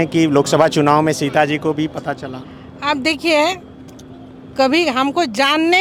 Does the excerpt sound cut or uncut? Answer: uncut